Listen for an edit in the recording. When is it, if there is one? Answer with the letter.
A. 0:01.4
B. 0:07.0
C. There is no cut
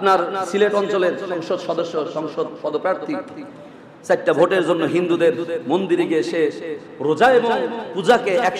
A